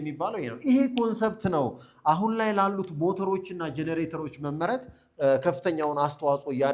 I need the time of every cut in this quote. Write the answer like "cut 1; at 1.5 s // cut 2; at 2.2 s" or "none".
none